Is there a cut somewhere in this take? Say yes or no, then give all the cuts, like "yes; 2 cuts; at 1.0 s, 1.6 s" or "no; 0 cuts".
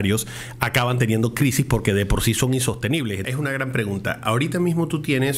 yes; 1 cut; at 3.2 s